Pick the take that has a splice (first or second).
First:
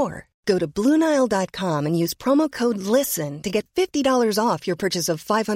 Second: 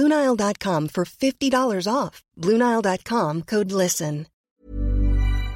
second